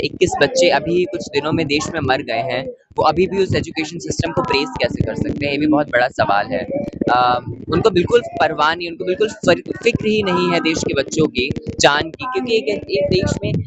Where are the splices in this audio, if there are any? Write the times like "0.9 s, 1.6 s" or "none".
none